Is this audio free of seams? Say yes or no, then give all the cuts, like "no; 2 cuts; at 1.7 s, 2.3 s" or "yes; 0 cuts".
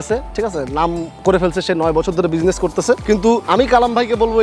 no; 1 cut; at 3.2 s